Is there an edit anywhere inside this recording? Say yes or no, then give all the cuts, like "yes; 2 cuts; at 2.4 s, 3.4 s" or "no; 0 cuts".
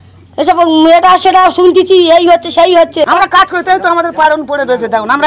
yes; 1 cut; at 3.1 s